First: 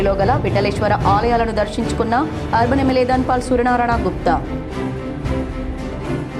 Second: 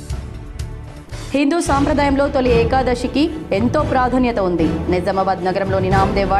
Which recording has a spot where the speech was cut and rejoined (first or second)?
second